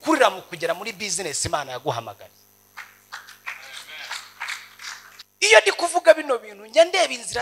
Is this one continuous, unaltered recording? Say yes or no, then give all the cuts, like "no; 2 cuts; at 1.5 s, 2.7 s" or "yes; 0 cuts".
no; 1 cut; at 5.2 s